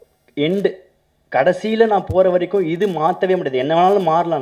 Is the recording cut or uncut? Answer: uncut